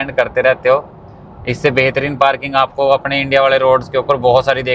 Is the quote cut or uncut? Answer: uncut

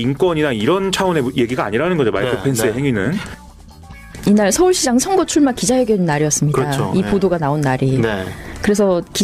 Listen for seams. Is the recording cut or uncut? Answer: cut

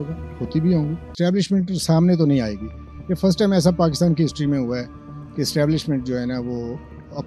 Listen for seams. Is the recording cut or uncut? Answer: cut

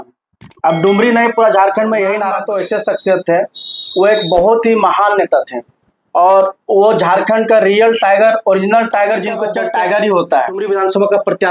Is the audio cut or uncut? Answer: cut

